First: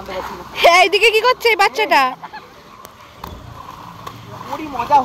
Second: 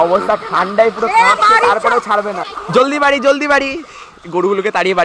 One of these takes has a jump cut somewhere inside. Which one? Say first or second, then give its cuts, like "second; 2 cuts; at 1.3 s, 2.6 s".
second; 1 cut; at 2.5 s